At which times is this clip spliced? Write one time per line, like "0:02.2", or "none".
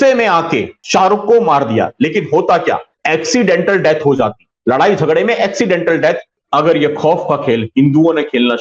0:02.9
0:06.4